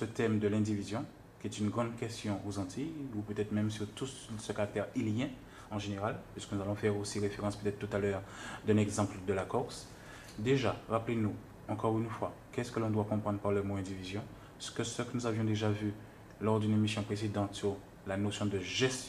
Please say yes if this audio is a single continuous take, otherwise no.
yes